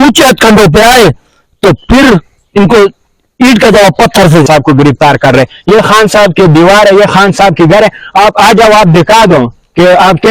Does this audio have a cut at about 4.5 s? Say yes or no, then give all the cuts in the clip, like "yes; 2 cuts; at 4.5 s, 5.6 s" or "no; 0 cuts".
yes; 1 cut; at 4.5 s